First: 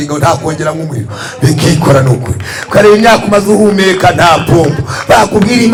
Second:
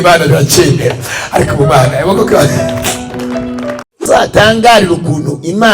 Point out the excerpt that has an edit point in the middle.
second; 1 cut; at 3.8 s

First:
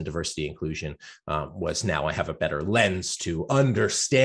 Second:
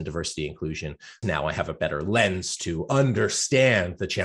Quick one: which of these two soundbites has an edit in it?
second; 1 cut; at 1.2 s

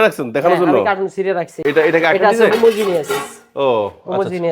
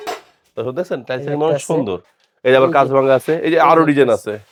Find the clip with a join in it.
first; 1 cut; at 1.5 s

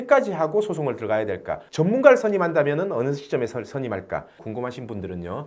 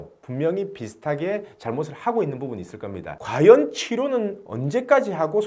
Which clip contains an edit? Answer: second; 1 cut; at 3.1 s

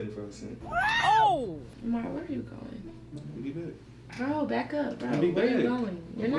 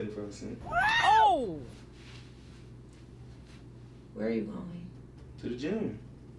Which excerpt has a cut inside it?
first; 1 cut; at 1.7 s

